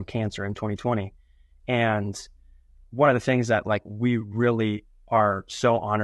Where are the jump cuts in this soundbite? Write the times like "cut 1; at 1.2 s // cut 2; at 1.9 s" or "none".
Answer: none